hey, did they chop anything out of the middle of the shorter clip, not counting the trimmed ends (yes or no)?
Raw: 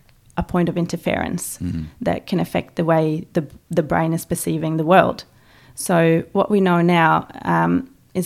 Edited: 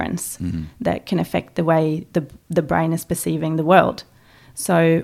no